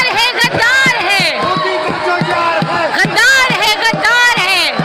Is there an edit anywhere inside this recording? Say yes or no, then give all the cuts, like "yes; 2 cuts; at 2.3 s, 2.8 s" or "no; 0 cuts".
no; 0 cuts